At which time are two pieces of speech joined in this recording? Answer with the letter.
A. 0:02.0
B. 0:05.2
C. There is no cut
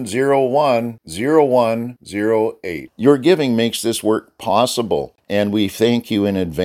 B